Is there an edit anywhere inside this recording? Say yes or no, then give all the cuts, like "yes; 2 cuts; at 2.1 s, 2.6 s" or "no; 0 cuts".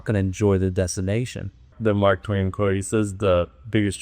yes; 1 cut; at 1.7 s